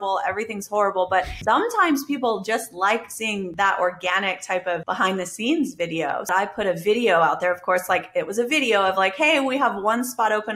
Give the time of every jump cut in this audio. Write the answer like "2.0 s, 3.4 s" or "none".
1.3 s, 3.5 s, 4.8 s, 6.3 s